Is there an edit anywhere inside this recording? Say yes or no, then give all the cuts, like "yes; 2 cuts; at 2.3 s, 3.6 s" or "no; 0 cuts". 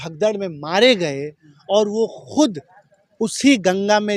no; 0 cuts